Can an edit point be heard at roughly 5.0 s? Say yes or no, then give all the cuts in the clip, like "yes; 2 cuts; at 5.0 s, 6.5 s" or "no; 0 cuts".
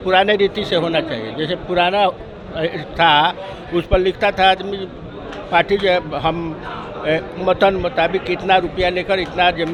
no; 0 cuts